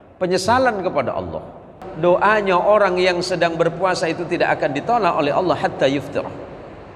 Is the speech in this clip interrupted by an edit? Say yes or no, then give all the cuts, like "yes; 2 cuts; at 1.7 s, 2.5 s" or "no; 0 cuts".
yes; 1 cut; at 1.8 s